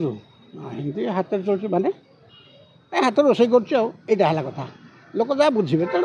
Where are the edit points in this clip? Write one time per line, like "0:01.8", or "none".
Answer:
none